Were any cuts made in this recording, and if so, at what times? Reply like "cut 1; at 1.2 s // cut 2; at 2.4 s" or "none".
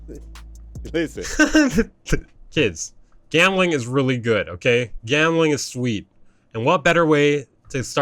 cut 1; at 2.4 s